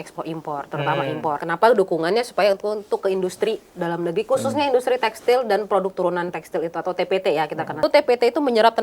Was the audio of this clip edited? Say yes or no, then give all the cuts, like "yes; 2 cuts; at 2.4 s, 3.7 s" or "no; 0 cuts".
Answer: yes; 2 cuts; at 1.4 s, 7.7 s